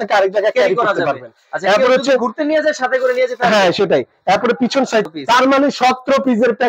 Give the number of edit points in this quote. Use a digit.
1